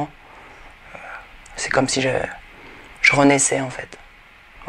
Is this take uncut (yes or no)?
yes